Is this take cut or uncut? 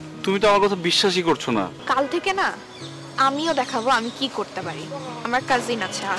cut